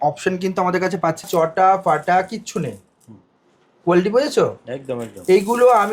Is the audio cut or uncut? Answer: cut